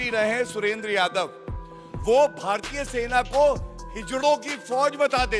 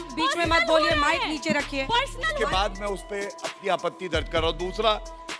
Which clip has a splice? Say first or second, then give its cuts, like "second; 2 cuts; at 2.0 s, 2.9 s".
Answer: second; 1 cut; at 2.2 s